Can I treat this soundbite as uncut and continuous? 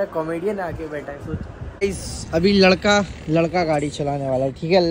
no; 1 cut; at 1.8 s

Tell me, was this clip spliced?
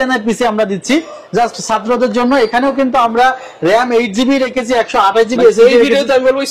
no; 0 cuts

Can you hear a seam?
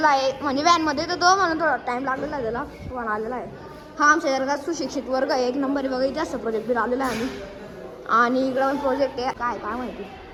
no; 0 cuts

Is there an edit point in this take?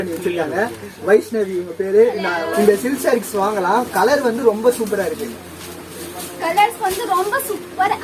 yes; 1 cut; at 2.5 s

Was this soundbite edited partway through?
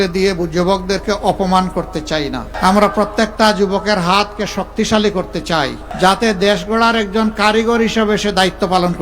yes; 2 cuts; at 2.5 s, 5.8 s

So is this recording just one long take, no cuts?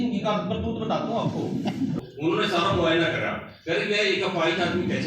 no; 1 cut; at 2.0 s

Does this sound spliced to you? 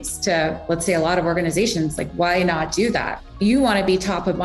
yes; 1 cut; at 3.1 s

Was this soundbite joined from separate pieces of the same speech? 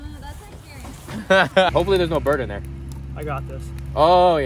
yes; 1 cut; at 1.7 s

